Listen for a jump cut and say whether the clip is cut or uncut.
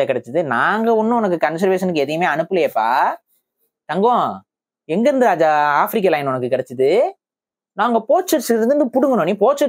uncut